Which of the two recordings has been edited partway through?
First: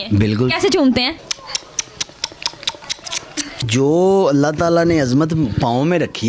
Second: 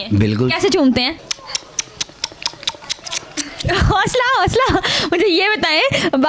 first; 1 cut; at 3.6 s

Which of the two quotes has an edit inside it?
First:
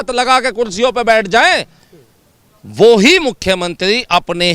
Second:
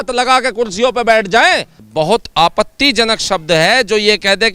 second; 1 cut; at 1.8 s

